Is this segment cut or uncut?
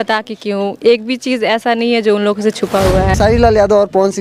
cut